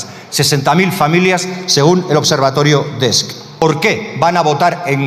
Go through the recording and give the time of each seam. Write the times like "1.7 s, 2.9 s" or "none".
3.6 s